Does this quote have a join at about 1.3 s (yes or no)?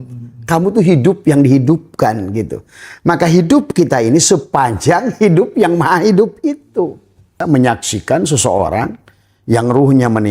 no